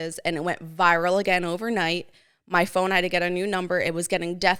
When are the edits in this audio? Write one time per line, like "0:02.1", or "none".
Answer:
none